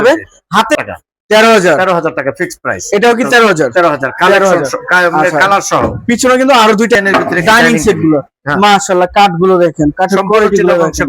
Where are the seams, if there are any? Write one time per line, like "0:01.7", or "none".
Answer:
0:00.8
0:07.0